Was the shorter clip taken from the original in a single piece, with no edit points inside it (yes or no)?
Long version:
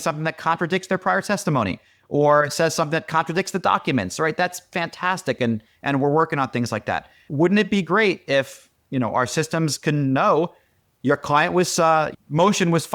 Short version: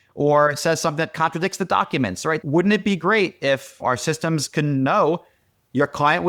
no